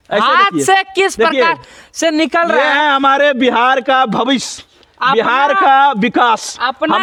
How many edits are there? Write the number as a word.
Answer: zero